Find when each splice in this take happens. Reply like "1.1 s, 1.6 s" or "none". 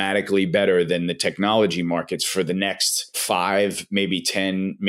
3.2 s